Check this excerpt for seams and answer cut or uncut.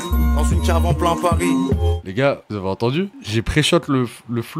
uncut